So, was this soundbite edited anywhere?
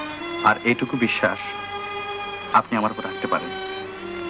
no; 0 cuts

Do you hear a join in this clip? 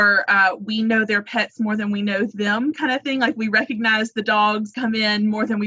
yes; 1 cut; at 4.7 s

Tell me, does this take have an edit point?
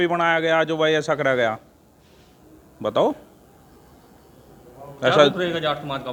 no; 0 cuts

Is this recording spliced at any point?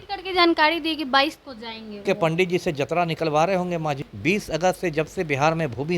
yes; 2 cuts; at 2.0 s, 4.1 s

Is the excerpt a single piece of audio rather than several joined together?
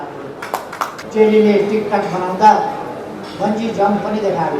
no; 1 cut; at 1.0 s

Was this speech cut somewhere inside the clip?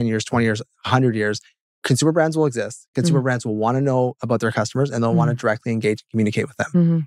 no; 0 cuts

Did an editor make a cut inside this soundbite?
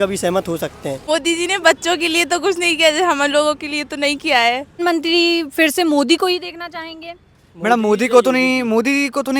yes; 2 cuts; at 1.0 s, 4.8 s

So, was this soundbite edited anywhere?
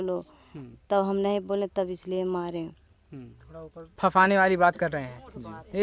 yes; 1 cut; at 3.9 s

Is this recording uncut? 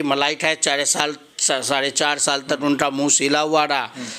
yes; 0 cuts

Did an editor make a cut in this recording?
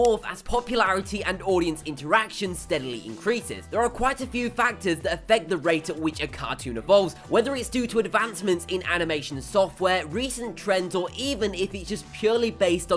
yes; 1 cut; at 9.0 s

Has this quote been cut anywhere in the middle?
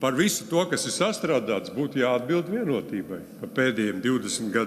no; 0 cuts

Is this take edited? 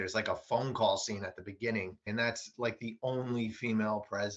yes; 1 cut; at 2.1 s

